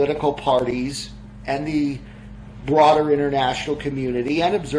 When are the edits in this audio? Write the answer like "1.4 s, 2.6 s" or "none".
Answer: none